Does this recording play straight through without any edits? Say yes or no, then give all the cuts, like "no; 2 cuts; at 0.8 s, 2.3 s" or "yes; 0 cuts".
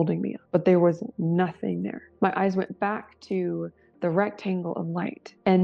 no; 1 cut; at 2.0 s